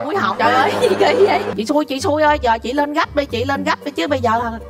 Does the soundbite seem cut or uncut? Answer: cut